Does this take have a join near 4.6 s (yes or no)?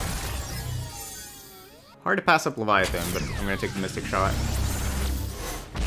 no